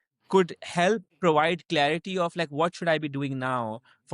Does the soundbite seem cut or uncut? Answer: cut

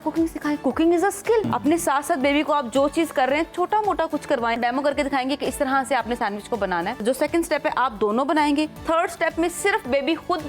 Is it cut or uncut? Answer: cut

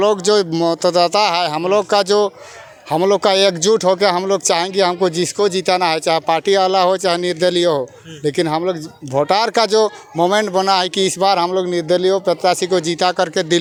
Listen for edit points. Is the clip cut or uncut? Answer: uncut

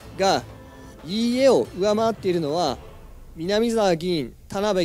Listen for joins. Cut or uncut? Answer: uncut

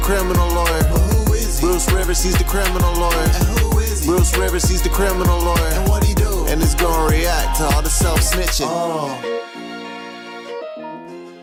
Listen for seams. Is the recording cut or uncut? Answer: uncut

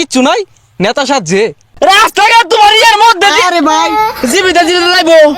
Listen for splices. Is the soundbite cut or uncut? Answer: cut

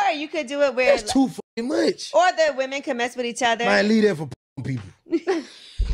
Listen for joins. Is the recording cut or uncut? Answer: uncut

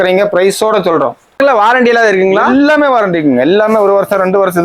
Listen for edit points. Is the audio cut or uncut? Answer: cut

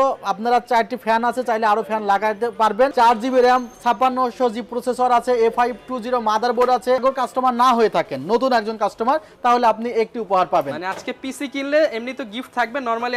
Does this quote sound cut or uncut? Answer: cut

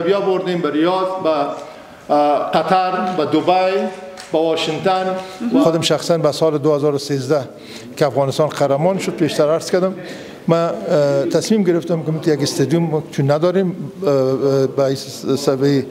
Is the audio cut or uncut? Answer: cut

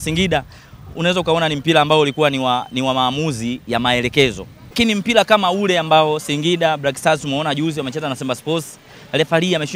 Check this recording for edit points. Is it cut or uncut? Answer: cut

